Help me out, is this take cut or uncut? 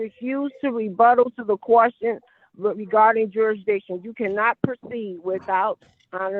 uncut